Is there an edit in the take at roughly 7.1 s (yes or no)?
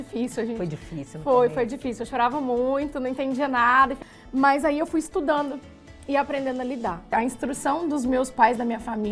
yes